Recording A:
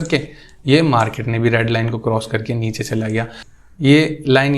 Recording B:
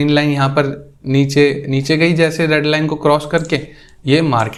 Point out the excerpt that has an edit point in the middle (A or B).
A